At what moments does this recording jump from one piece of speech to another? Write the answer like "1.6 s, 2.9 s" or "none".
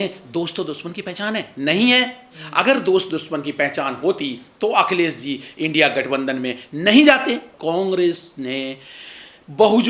7.5 s